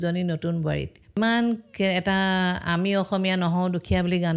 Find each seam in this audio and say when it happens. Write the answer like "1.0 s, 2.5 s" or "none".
1.2 s